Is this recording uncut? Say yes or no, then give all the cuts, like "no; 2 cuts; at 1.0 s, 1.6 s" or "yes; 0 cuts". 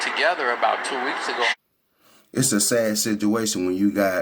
no; 1 cut; at 1.5 s